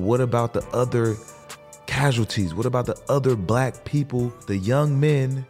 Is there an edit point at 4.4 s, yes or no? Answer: yes